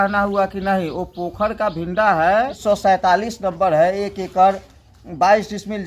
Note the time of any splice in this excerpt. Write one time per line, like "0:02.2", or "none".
0:02.6

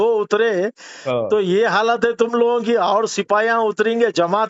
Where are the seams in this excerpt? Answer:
none

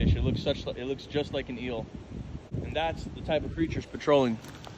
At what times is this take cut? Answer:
0:02.5

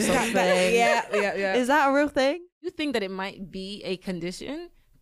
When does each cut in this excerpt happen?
0:02.6

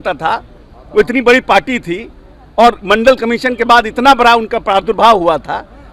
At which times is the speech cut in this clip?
none

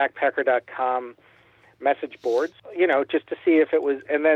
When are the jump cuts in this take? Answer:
0:02.6

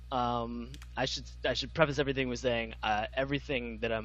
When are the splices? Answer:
0:02.3

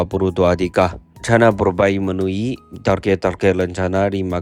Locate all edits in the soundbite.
0:01.1

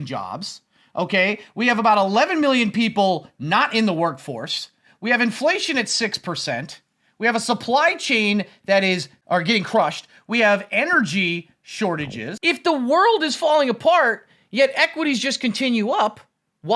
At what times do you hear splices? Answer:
0:09.1
0:12.2

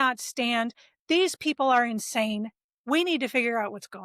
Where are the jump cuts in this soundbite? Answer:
none

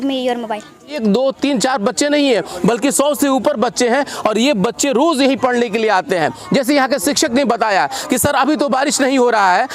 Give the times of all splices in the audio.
0:01.0

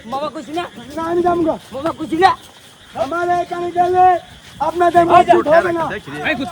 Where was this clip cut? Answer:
none

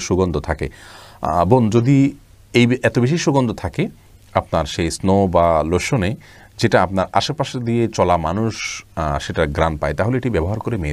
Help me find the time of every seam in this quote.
none

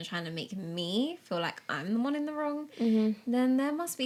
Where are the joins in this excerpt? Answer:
none

